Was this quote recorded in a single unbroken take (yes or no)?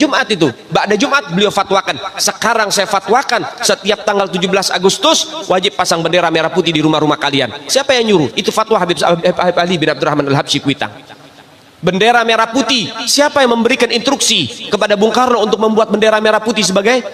yes